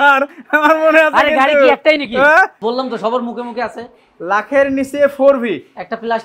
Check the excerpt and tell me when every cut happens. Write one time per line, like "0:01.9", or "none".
0:02.6